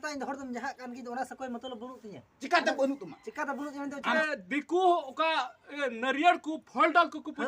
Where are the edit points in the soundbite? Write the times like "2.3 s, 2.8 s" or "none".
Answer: 4.2 s